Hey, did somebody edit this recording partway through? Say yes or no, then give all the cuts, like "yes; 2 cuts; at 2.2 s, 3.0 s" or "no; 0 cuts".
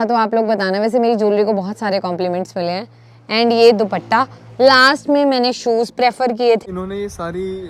yes; 1 cut; at 6.6 s